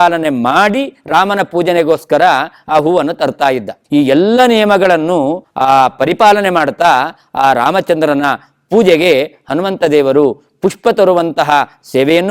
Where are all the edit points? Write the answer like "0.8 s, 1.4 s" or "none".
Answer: 3.8 s